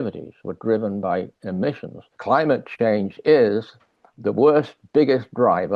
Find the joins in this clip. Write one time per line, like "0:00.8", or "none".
0:02.1